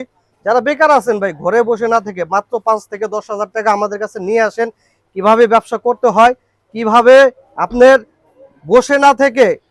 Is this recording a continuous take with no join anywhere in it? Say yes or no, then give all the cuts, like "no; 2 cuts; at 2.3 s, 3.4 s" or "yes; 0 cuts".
yes; 0 cuts